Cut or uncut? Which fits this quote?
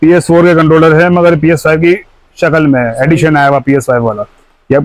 uncut